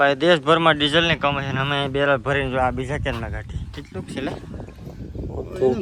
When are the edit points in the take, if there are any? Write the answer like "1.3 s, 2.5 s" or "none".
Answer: none